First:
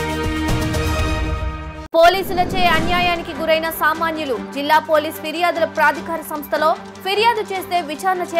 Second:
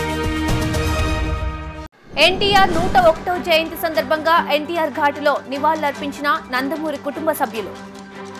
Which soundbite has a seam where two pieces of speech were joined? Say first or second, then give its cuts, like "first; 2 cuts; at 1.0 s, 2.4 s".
first; 1 cut; at 1.7 s